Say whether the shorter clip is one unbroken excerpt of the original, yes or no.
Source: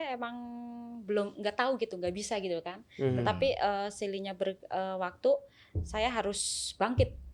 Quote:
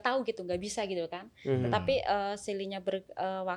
yes